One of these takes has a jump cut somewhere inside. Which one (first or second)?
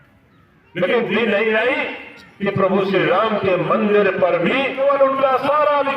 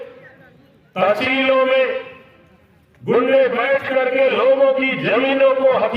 first